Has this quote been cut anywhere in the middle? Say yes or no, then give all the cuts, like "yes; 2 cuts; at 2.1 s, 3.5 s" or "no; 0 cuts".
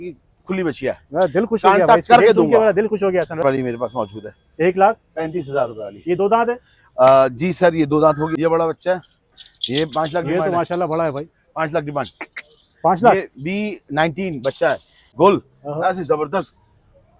yes; 3 cuts; at 3.4 s, 8.4 s, 15.0 s